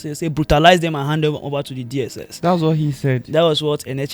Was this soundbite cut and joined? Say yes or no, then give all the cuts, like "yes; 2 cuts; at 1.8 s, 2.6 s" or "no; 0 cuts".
no; 0 cuts